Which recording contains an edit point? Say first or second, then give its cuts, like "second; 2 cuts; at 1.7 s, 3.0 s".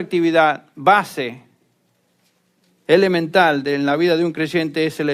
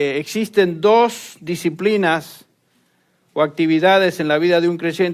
second; 1 cut; at 2.2 s